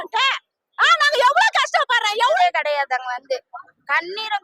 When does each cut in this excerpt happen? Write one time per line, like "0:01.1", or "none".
0:02.4

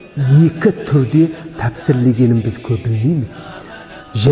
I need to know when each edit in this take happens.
none

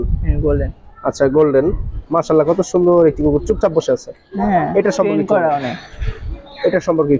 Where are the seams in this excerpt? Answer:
0:02.0

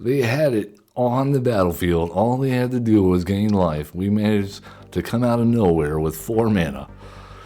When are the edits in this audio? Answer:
none

